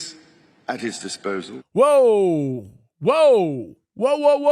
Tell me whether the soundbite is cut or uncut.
cut